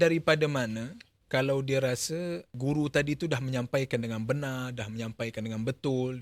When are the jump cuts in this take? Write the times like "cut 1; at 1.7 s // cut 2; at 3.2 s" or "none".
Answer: cut 1; at 2.5 s